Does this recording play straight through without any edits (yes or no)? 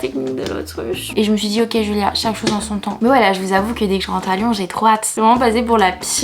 no